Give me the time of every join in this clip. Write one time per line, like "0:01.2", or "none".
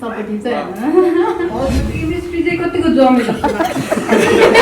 0:01.8